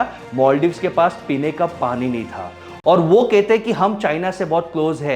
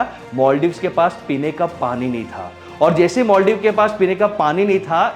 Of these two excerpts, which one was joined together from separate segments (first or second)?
first